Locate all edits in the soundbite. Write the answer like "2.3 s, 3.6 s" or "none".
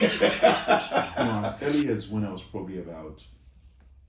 1.5 s